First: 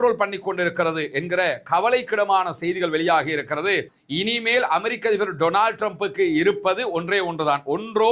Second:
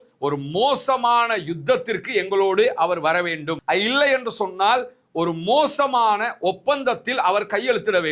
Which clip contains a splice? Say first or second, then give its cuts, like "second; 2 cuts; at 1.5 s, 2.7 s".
first; 1 cut; at 4.0 s